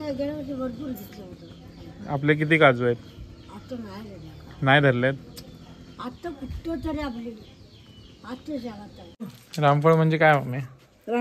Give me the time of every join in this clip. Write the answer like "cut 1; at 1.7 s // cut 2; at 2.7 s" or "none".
cut 1; at 9.2 s